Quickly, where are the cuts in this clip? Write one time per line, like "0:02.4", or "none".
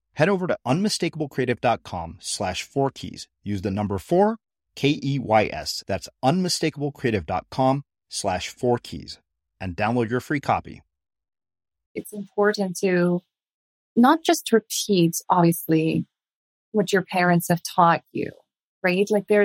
0:12.0
0:13.8